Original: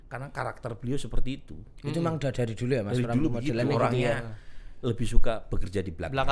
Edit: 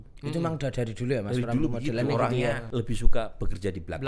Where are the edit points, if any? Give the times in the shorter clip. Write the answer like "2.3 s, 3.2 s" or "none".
2.6 s